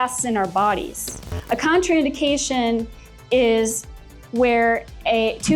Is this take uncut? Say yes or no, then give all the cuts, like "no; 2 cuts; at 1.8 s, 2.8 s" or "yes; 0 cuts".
no; 1 cut; at 1.3 s